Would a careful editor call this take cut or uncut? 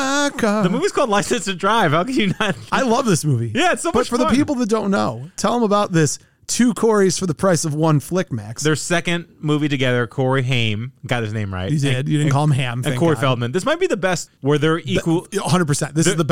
cut